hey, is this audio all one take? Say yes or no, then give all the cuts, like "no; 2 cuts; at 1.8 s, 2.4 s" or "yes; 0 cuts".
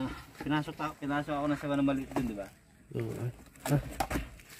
yes; 0 cuts